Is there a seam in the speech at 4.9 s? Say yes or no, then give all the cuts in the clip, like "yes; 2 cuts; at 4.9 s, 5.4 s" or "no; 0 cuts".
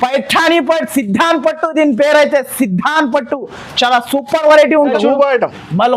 yes; 1 cut; at 4.9 s